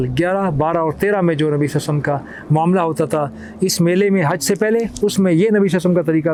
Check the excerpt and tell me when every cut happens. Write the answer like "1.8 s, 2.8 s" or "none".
none